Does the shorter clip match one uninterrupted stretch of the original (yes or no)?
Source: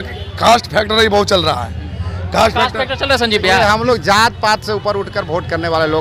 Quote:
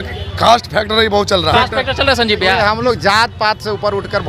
no